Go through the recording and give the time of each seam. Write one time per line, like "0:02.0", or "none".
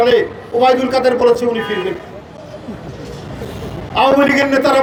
none

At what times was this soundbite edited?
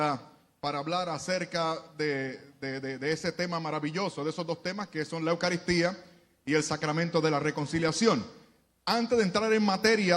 0:06.0

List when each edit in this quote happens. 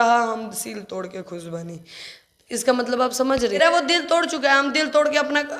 0:03.6

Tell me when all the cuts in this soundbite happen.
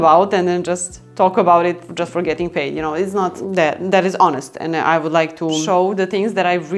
0:01.9
0:03.4
0:05.6

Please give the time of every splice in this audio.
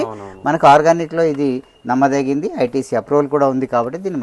none

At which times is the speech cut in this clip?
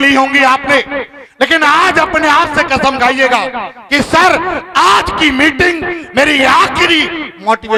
none

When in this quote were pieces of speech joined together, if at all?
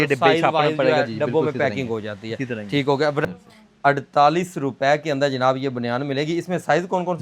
0:03.2

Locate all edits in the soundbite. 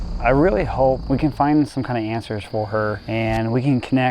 0:01.0
0:03.0

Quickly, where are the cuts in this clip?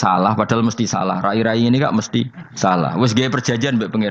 0:02.1

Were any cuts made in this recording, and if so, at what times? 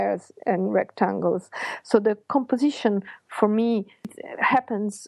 0:04.1

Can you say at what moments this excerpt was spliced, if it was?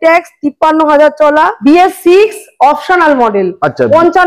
0:01.6

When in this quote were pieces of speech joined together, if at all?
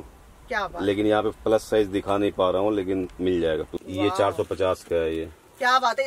0:03.8

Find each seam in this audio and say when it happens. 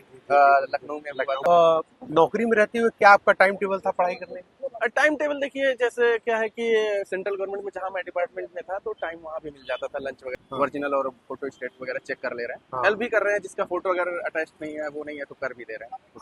0:01.4
0:10.3

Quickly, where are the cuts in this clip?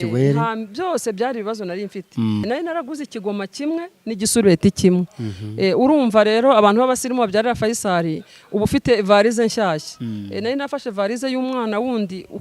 0:02.4

